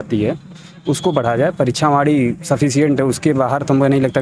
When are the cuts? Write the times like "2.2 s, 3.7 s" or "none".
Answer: none